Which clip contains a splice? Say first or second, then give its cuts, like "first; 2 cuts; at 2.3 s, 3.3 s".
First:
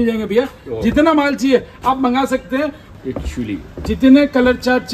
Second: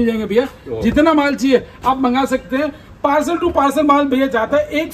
first; 1 cut; at 2.9 s